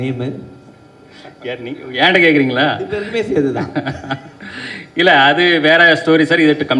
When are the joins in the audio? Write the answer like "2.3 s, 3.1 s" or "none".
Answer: none

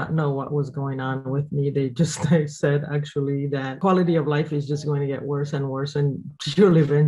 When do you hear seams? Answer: 3.7 s

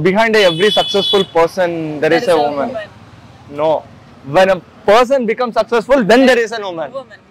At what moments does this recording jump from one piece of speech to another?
none

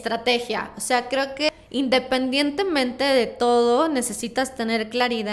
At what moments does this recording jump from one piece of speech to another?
1.5 s

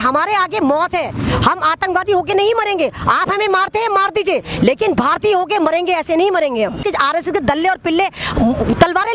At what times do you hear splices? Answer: 6.8 s

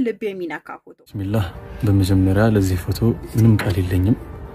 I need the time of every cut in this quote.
1.3 s

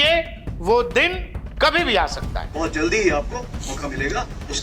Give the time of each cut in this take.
2.4 s

